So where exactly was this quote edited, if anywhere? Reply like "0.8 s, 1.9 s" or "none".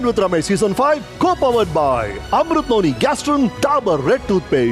1.1 s, 3.5 s